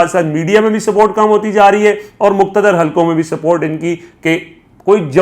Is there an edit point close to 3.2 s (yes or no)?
no